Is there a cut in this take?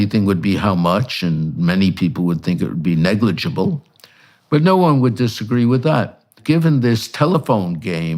yes; 1 cut; at 6.4 s

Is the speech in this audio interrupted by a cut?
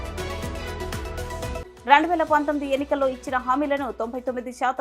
yes; 1 cut; at 1.6 s

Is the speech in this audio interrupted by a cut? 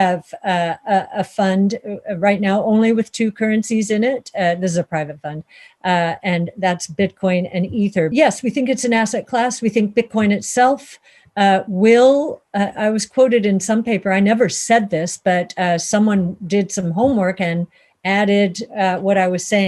yes; 1 cut; at 8.1 s

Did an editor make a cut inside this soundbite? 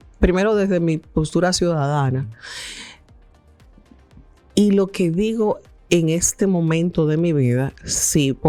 no; 0 cuts

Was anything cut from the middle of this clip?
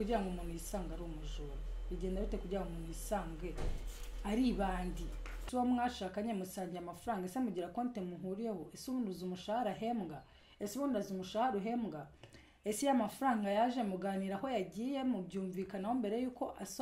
yes; 1 cut; at 5.3 s

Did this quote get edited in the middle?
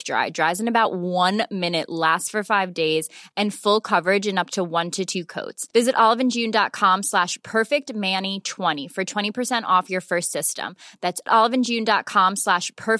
no; 0 cuts

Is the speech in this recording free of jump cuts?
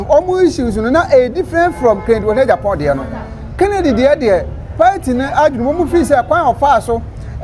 yes; 0 cuts

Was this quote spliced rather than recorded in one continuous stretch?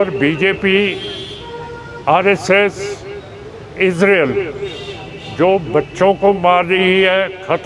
no; 0 cuts

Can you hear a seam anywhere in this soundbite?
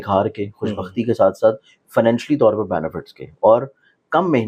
no; 0 cuts

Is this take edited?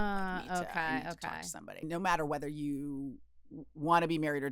yes; 1 cut; at 1.9 s

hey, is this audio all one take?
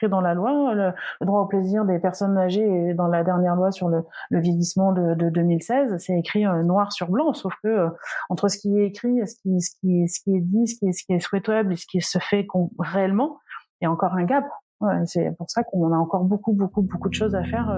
yes; 0 cuts

